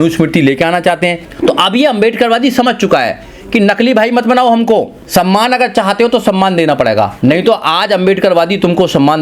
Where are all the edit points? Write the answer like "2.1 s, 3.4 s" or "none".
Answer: 1.2 s, 5.0 s, 7.1 s